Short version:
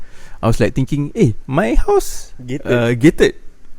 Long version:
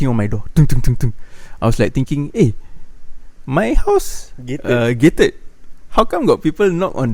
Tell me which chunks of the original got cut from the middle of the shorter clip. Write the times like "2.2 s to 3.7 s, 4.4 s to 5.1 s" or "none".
2.6 s to 3.4 s